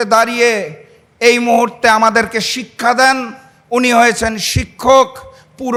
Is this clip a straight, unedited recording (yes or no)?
yes